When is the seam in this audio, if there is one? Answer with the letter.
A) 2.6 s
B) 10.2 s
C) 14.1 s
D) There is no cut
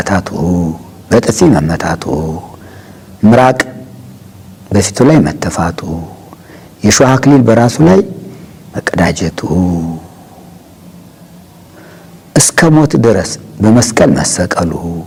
D